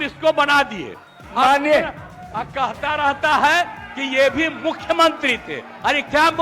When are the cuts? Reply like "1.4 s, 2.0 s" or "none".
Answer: 1.2 s